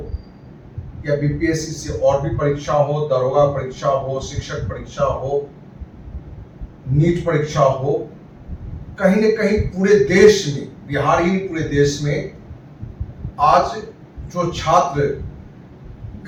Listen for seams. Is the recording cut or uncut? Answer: uncut